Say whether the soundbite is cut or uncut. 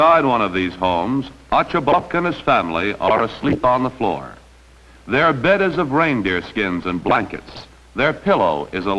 cut